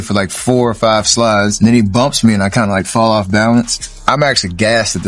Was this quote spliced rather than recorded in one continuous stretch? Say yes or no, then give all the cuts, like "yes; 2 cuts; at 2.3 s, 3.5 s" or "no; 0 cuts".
yes; 2 cuts; at 1.5 s, 4.0 s